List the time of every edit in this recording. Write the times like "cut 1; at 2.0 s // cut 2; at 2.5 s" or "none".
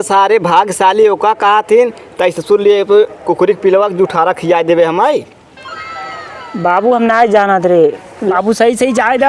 cut 1; at 8.3 s